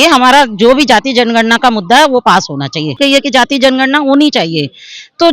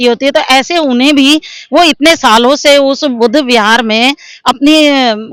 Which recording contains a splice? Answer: first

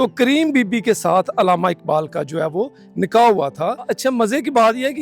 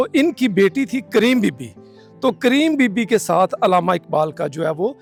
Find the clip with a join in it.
first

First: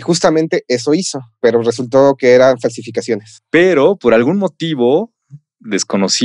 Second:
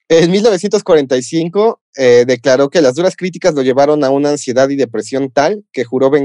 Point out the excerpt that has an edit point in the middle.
first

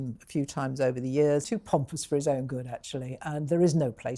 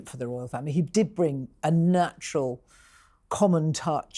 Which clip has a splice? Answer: first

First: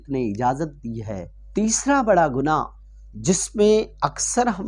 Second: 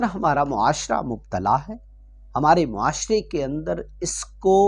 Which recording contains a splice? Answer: first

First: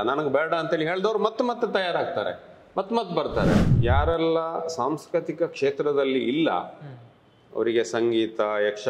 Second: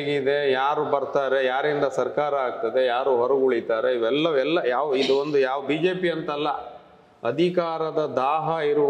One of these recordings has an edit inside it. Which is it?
first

